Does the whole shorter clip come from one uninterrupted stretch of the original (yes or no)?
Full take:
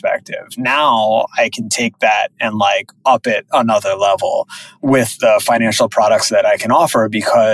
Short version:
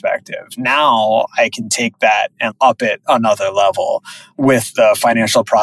no